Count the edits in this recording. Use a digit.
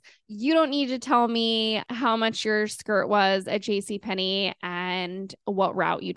1